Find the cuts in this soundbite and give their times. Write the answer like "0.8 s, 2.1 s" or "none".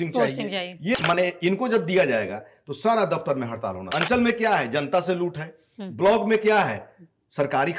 0.9 s, 3.8 s